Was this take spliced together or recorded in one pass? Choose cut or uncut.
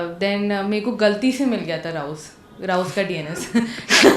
uncut